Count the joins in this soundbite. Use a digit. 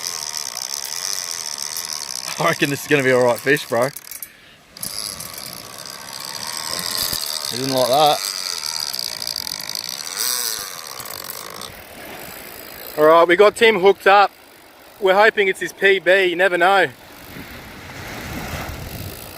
1